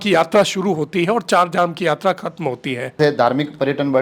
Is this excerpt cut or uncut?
cut